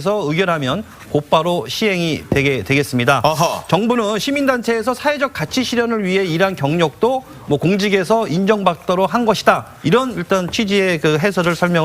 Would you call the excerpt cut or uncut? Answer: cut